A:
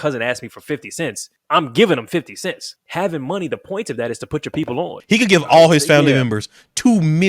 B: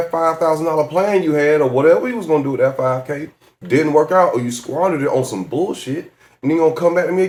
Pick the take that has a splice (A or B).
A